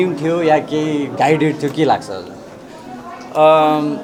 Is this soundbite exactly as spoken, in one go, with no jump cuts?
yes; 0 cuts

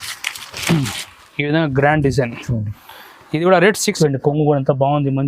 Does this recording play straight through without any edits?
no; 1 cut; at 4.0 s

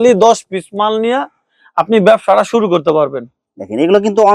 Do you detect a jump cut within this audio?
no; 0 cuts

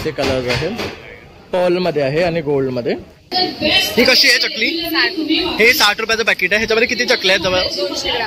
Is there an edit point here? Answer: yes; 1 cut; at 3.3 s

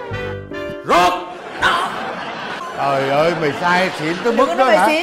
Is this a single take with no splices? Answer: no; 1 cut; at 2.6 s

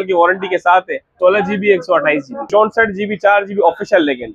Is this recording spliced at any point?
yes; 2 cuts; at 1.1 s, 2.5 s

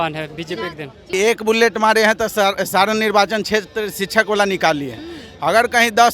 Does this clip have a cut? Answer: yes; 1 cut; at 1.1 s

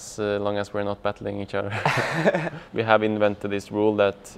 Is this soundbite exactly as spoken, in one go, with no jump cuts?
no; 1 cut; at 2.6 s

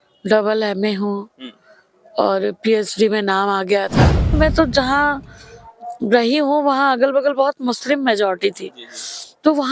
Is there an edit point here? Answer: yes; 1 cut; at 4.3 s

